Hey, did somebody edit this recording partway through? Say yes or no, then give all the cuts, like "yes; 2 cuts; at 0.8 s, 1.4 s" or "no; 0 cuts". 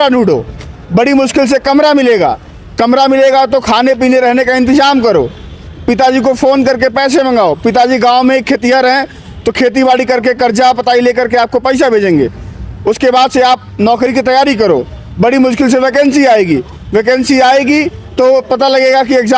no; 0 cuts